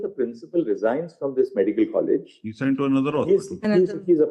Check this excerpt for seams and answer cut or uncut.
uncut